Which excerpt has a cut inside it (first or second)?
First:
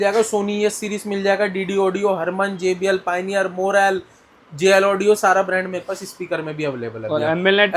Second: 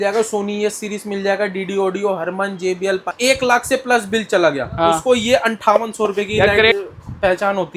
second